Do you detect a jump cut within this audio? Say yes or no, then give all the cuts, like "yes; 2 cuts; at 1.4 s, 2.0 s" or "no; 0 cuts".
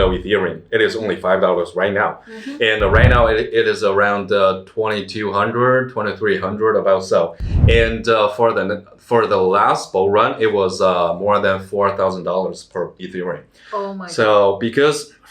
no; 0 cuts